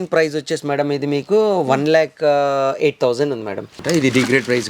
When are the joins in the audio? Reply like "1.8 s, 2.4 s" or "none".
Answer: 3.7 s